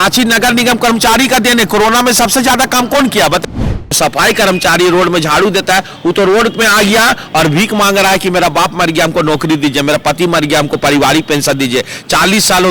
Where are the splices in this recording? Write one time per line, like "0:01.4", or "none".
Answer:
0:03.5

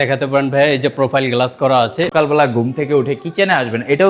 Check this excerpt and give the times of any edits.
0:02.1

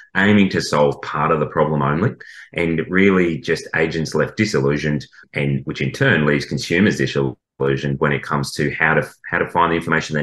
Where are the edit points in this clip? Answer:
0:05.2

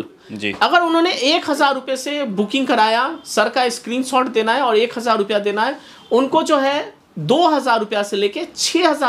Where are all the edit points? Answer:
none

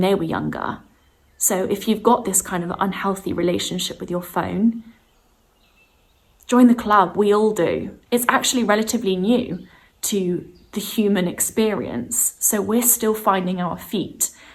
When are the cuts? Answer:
none

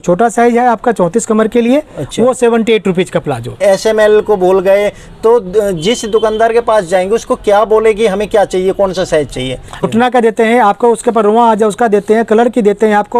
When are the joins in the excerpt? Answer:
0:03.6
0:09.8

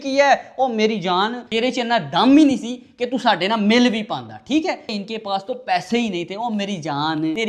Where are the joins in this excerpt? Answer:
0:04.8

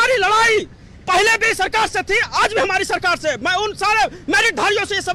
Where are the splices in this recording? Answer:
none

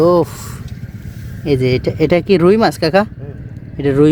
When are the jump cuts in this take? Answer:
none

